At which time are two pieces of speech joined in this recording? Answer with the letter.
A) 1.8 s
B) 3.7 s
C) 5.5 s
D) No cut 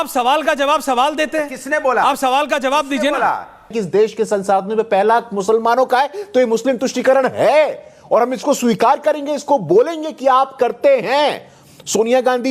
B